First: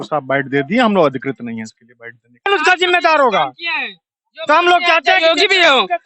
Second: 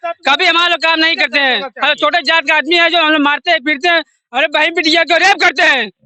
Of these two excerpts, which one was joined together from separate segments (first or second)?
first